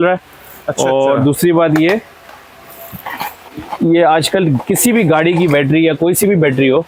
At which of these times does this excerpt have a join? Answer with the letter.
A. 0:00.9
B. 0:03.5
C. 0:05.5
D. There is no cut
D